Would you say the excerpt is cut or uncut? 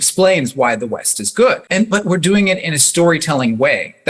cut